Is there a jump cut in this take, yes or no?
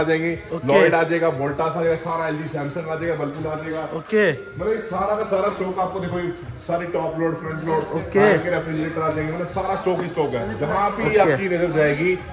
no